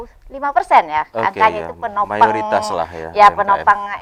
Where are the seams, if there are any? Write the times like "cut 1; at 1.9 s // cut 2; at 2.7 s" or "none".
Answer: none